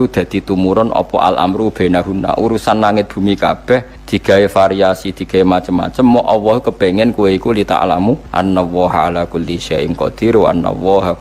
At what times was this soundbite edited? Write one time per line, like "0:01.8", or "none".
0:04.0
0:08.3